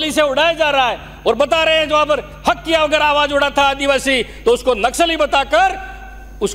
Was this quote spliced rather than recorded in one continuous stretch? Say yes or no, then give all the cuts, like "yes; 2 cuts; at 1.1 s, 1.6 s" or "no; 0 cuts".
no; 0 cuts